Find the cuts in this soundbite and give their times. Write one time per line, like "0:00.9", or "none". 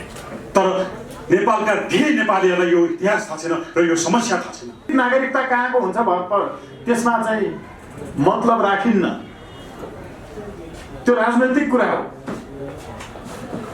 0:04.9

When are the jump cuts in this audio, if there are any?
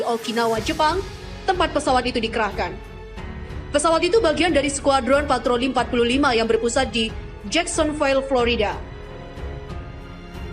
0:09.3

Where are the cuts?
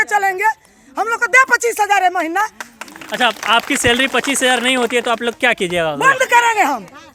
none

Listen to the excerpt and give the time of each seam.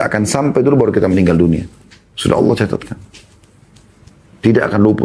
none

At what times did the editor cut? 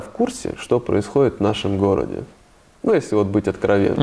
none

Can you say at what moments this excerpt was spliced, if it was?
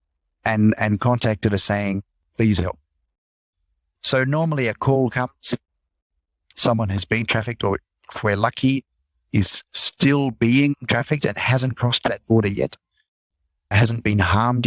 0:03.9
0:06.5
0:13.7

